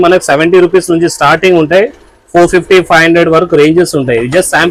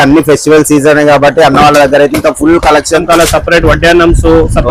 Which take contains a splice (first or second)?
second